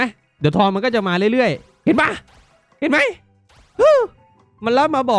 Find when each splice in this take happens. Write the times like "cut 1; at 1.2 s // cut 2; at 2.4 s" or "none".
none

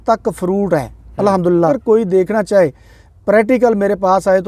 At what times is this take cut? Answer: cut 1; at 1.7 s

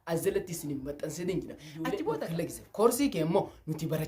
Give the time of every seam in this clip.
cut 1; at 2.2 s

